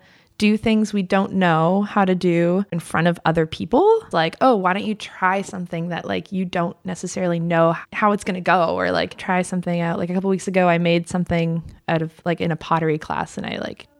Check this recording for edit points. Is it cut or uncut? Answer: cut